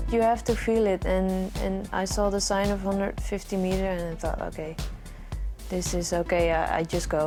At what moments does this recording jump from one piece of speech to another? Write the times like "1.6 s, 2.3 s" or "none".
none

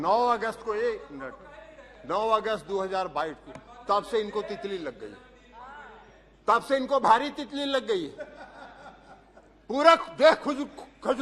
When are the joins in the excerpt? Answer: none

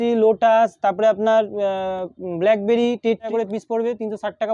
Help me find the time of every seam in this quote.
3.3 s

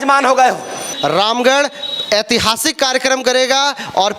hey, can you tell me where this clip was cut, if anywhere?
0.9 s

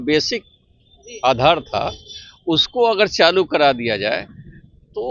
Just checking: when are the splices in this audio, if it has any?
none

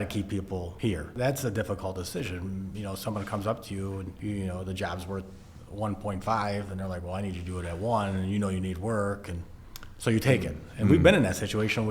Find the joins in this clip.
1.1 s, 4.1 s

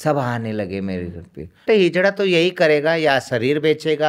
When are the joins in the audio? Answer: 1.6 s

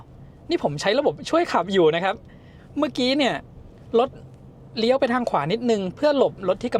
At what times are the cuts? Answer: none

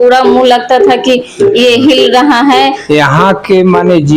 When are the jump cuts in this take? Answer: 2.8 s

